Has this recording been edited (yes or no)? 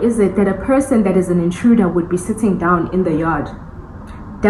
no